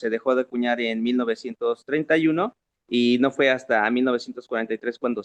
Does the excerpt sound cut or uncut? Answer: uncut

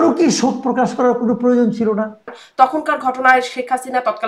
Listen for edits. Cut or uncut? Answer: cut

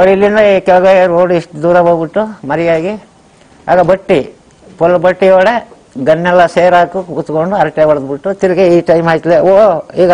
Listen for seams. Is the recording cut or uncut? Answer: uncut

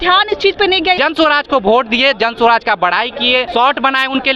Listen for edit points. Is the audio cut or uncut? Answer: cut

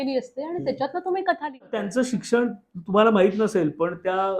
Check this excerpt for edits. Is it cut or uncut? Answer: cut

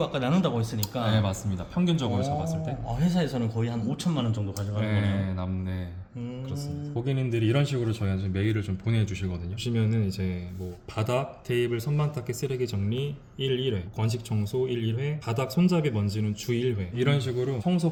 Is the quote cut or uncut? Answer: uncut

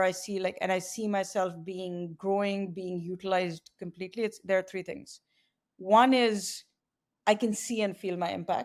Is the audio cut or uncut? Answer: uncut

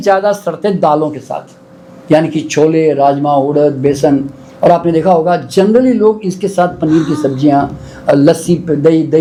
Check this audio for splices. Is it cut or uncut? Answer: uncut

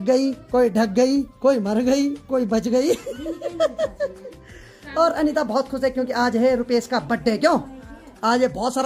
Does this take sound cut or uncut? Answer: uncut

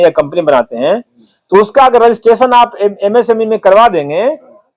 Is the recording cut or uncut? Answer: uncut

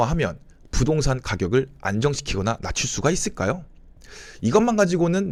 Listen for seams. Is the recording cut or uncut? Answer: uncut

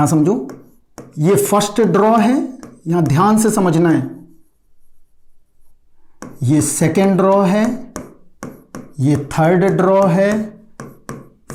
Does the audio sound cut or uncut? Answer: uncut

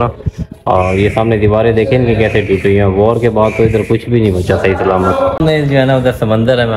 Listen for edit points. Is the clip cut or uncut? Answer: cut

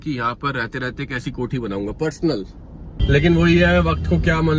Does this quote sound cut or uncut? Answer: uncut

